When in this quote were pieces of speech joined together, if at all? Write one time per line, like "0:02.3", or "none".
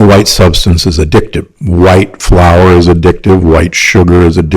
0:01.6